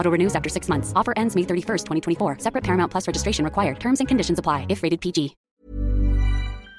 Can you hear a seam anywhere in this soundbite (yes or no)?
yes